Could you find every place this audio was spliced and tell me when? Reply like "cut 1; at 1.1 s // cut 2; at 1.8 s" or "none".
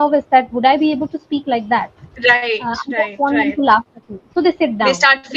none